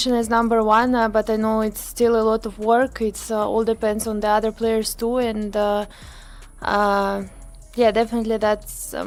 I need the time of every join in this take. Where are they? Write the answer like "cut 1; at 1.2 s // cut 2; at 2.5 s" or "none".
none